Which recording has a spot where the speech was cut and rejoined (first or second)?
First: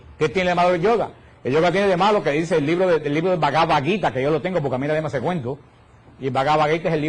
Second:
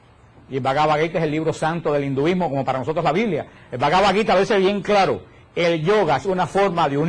first